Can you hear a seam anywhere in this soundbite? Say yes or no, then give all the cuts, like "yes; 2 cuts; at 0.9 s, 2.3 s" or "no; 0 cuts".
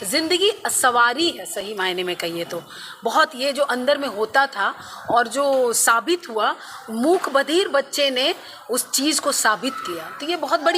no; 0 cuts